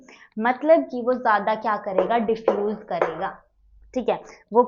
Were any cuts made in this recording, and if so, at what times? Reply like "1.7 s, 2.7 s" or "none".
none

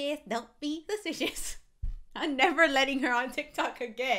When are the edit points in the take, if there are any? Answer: none

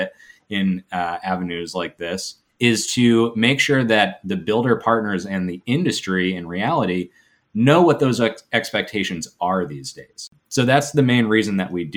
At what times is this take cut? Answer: 2.4 s, 10.4 s

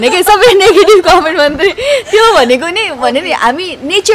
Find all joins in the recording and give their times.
none

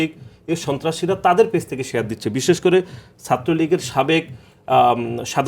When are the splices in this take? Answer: none

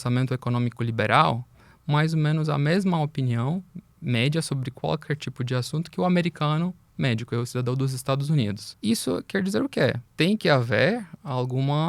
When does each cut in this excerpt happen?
8.7 s, 10.0 s

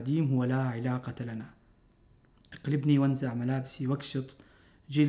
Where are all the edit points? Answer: 4.0 s

